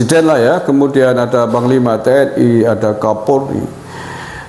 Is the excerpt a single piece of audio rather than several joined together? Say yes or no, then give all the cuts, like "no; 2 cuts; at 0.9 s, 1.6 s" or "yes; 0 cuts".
yes; 0 cuts